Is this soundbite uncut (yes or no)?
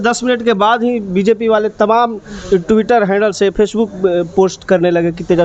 yes